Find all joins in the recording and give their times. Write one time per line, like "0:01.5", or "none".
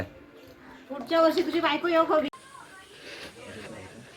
0:02.3